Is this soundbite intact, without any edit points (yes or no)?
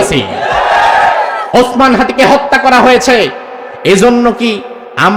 no